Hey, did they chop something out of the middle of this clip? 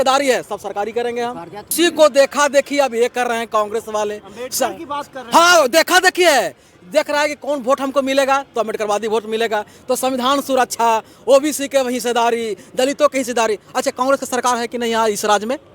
yes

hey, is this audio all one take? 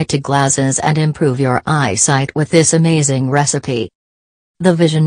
yes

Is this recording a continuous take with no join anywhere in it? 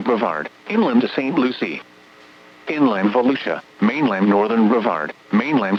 yes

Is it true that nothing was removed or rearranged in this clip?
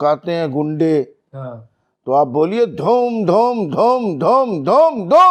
yes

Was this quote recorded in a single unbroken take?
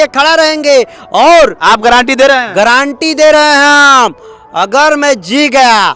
yes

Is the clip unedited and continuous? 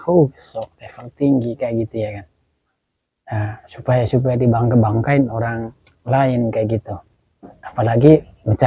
yes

